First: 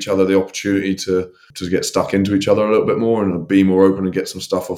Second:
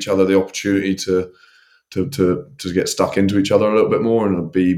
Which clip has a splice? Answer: first; 2 cuts; at 1.5 s, 3.4 s

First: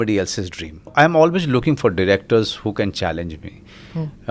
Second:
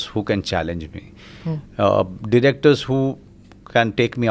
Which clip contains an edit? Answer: first; 1 cut; at 0.9 s

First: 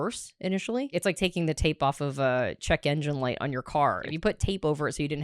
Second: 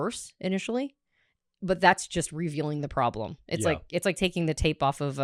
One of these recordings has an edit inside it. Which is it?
first; 2 cuts; at 0.9 s, 4.1 s

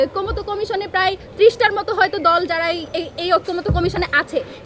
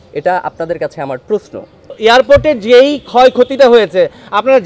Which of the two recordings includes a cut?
second; 1 cut; at 1.9 s

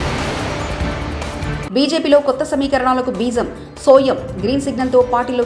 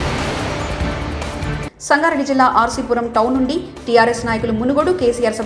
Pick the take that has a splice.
second; 1 cut; at 1.5 s

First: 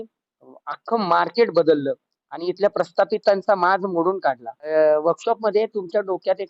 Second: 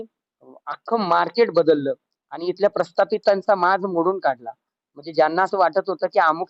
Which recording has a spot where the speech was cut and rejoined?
first; 1 cut; at 4.7 s

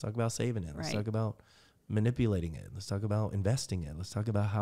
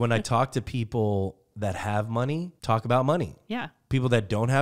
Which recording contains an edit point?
second; 1 cut; at 2.5 s

